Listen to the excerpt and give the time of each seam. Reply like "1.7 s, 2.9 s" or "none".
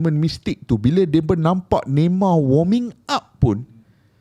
none